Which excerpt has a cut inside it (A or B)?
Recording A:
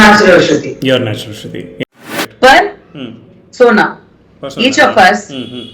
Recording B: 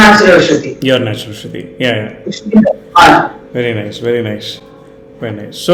A